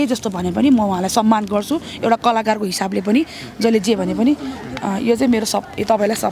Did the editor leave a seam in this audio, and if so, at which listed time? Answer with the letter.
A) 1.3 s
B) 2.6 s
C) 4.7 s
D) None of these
D